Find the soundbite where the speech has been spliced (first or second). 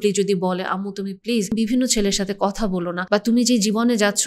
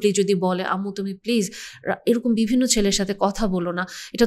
first